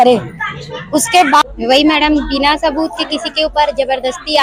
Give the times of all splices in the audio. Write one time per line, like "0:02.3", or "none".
0:01.4